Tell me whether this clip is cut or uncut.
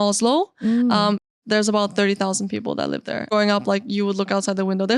cut